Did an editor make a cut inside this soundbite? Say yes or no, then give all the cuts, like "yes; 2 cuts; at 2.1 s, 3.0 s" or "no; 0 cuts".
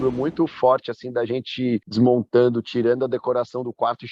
yes; 1 cut; at 1.9 s